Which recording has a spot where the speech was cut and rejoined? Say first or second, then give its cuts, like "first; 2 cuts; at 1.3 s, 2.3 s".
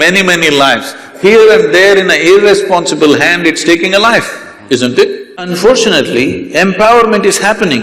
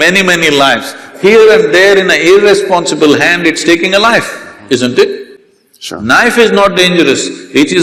first; 1 cut; at 5.4 s